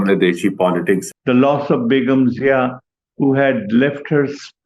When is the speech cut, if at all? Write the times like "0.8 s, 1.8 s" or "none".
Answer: 1.1 s